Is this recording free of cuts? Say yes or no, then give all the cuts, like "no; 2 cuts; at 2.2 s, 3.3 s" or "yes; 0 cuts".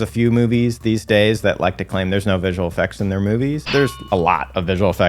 no; 1 cut; at 3.6 s